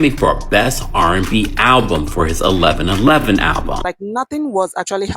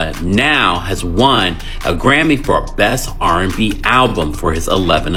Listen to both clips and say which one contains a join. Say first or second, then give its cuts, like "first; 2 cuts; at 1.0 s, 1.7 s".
first; 1 cut; at 3.8 s